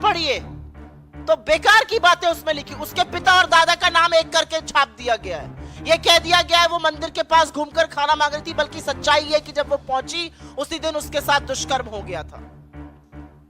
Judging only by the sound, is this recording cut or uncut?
cut